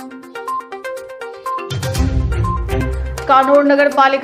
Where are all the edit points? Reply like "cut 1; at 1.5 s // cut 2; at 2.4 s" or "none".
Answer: cut 1; at 1.1 s